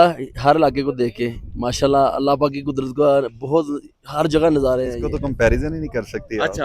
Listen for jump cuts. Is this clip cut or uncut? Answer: cut